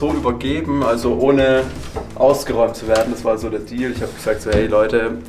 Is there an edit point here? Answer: no; 0 cuts

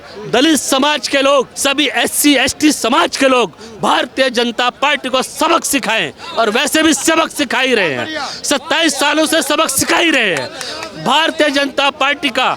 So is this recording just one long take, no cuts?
yes; 0 cuts

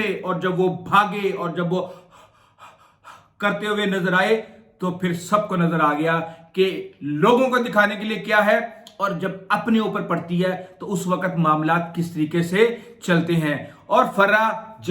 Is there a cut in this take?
no; 0 cuts

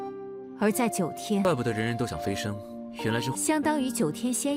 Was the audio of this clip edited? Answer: no; 0 cuts

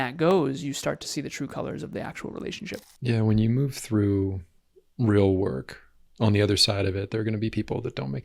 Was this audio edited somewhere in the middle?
yes; 1 cut; at 2.7 s

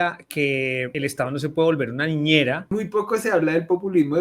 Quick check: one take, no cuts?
no; 2 cuts; at 0.9 s, 2.7 s

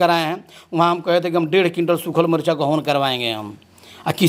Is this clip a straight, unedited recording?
yes; 0 cuts

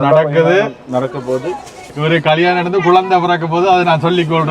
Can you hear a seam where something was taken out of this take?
yes; 1 cut; at 1.8 s

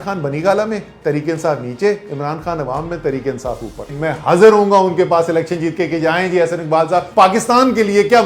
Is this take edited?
yes; 2 cuts; at 3.9 s, 7.1 s

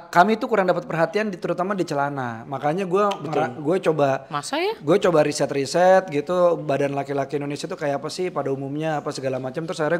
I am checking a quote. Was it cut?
no; 0 cuts

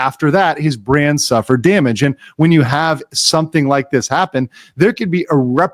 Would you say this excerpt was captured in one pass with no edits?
yes; 0 cuts

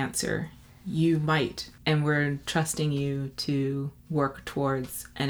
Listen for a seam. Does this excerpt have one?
yes; 1 cut; at 1.7 s

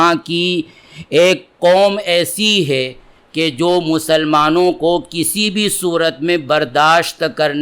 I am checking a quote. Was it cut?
no; 0 cuts

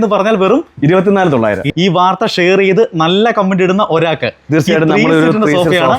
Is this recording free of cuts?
no; 1 cut; at 1.7 s

